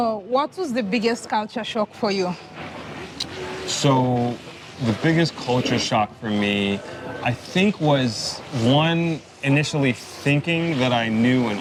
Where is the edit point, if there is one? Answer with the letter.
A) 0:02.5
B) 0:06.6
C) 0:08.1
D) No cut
D